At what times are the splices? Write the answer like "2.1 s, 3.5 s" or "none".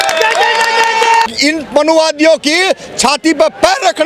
1.3 s